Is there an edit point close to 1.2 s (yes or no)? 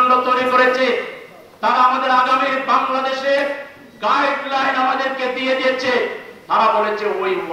no